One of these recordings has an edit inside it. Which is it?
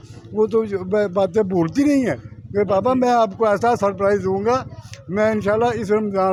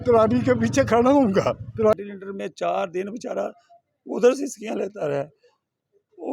second; 1 cut; at 1.9 s

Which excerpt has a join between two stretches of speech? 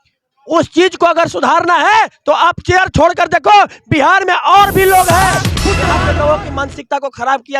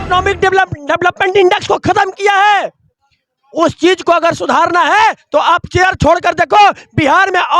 first; 1 cut; at 5.8 s

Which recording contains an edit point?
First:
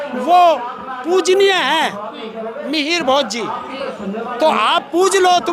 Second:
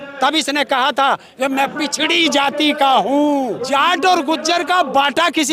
second; 1 cut; at 3.6 s

